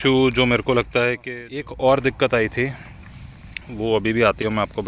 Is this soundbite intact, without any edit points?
no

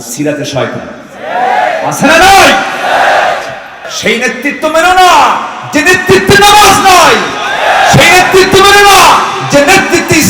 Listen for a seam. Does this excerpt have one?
yes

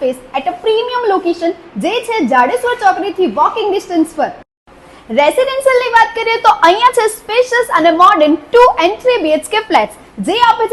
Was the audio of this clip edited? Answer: no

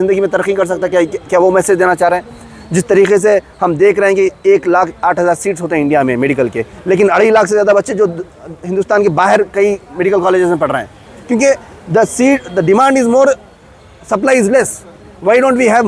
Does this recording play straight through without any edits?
yes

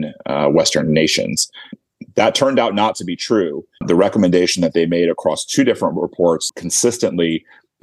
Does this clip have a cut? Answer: yes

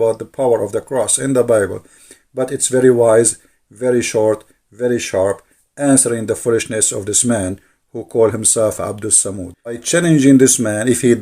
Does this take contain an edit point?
yes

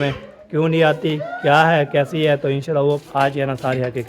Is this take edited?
yes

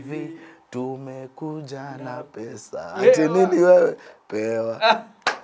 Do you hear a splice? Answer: no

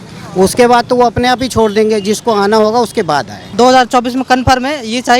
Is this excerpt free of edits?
no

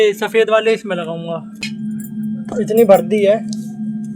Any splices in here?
yes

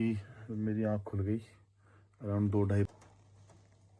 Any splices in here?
yes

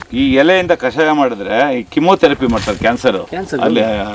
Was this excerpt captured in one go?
yes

